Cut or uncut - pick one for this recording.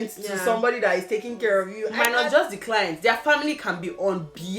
cut